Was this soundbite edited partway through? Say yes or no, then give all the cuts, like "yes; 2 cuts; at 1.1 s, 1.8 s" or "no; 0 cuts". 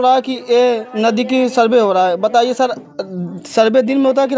no; 0 cuts